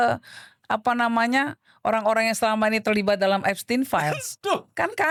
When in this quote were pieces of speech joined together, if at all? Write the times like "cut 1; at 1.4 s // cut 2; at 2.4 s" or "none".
none